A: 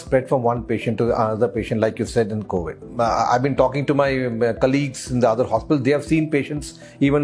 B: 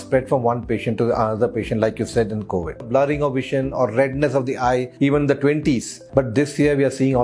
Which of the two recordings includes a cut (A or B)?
B